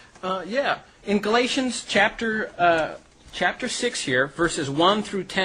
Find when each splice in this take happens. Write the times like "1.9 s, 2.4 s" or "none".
4.1 s